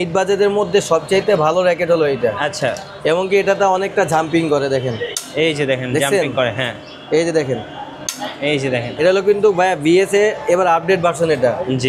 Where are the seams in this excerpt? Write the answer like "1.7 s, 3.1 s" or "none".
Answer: 8.9 s

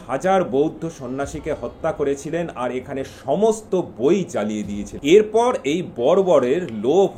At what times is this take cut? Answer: 4.8 s

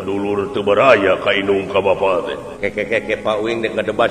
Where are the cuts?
2.5 s

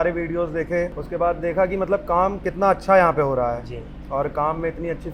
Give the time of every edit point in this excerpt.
none

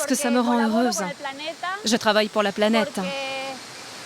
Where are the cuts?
3.1 s

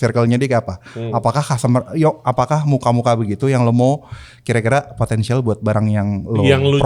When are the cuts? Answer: none

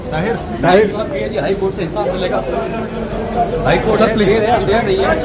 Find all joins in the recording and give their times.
none

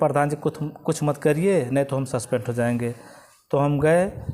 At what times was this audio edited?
none

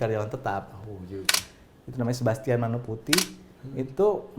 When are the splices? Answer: 1.4 s

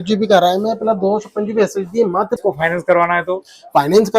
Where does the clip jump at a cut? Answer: 2.4 s

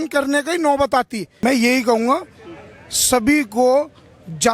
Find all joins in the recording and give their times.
1.2 s

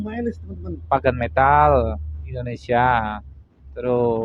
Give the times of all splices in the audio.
none

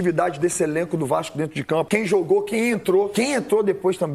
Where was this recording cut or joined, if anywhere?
1.9 s, 3.1 s

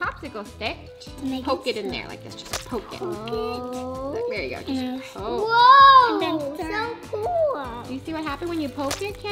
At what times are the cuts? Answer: 1.0 s

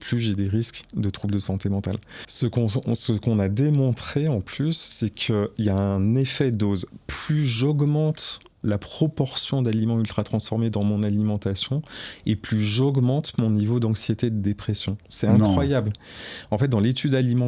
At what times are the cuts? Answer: 2.2 s

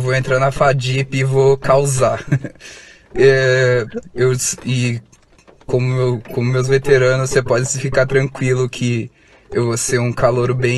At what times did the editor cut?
none

